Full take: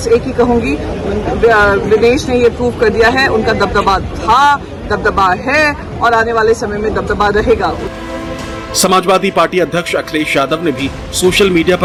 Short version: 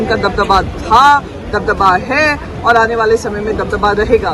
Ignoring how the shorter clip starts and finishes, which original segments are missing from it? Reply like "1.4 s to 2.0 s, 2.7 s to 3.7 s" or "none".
none